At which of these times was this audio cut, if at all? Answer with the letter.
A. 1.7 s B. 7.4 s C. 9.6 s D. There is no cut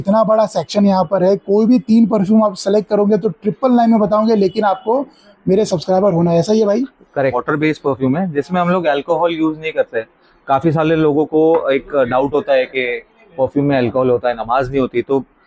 B